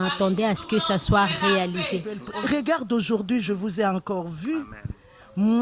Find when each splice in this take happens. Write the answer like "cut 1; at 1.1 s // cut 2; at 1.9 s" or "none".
cut 1; at 2.2 s

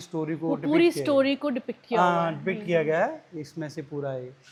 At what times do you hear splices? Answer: none

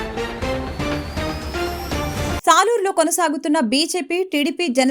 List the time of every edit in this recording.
cut 1; at 1.8 s

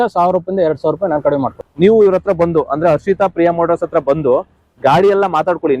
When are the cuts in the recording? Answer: cut 1; at 1.6 s

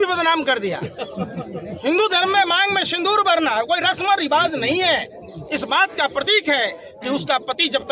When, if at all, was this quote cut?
none

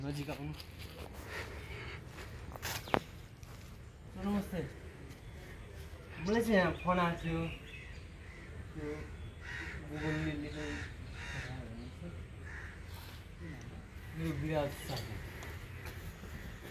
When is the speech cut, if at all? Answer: none

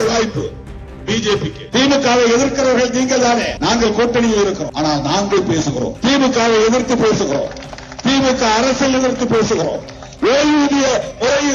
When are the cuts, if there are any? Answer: cut 1; at 1.6 s // cut 2; at 3.5 s // cut 3; at 4.7 s // cut 4; at 5.9 s

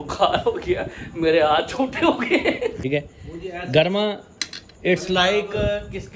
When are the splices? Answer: cut 1; at 2.8 s

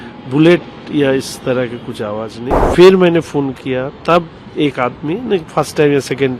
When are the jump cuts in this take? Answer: cut 1; at 2.6 s

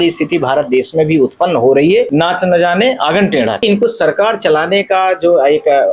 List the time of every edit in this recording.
cut 1; at 2.1 s // cut 2; at 3.6 s

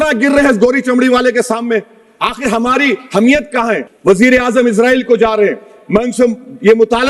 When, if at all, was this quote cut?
cut 1; at 3.9 s

